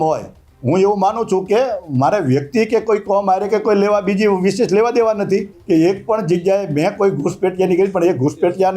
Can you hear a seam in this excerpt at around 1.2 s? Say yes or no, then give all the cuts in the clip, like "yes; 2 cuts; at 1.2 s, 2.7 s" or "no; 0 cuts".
no; 1 cut; at 5.5 s